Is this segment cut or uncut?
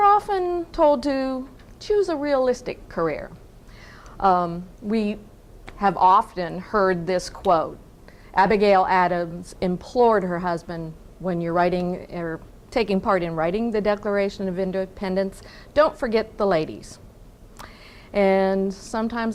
uncut